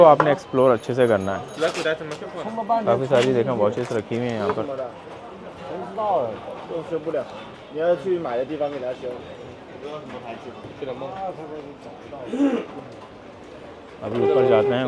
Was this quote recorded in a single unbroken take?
yes; 0 cuts

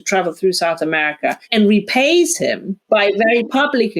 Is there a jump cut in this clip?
yes; 2 cuts; at 1.4 s, 2.7 s

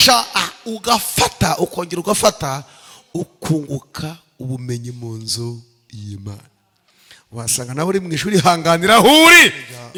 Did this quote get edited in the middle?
no; 0 cuts

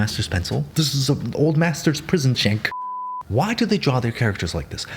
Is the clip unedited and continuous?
no; 1 cut; at 3.2 s

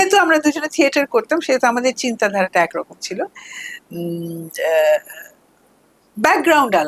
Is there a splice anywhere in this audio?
no; 0 cuts

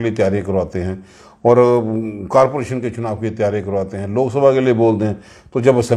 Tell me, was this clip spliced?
no; 0 cuts

